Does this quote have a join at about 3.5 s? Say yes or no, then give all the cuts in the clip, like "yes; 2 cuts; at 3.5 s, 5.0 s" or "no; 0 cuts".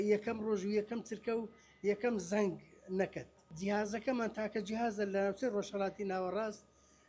yes; 1 cut; at 3.5 s